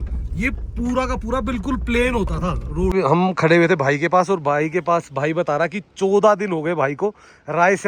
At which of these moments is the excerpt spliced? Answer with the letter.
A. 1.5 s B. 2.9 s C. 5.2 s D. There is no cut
B